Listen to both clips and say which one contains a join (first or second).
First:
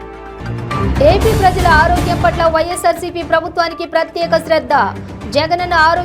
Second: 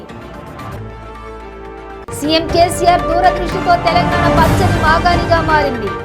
first